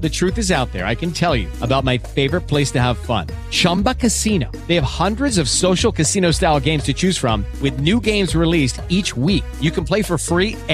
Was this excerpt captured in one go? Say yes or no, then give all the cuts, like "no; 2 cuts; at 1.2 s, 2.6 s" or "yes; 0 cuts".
yes; 0 cuts